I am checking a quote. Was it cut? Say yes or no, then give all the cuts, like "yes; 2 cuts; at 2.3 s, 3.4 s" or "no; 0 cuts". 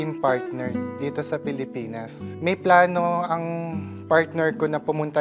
no; 0 cuts